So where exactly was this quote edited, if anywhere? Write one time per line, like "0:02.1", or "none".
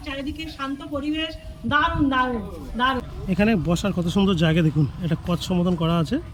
0:03.0